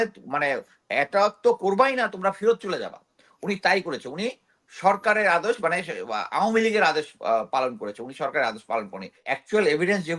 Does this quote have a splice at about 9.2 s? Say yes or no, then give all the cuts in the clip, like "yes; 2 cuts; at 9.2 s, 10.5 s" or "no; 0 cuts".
yes; 1 cut; at 9.2 s